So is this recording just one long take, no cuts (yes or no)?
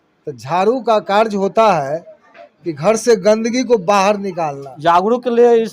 no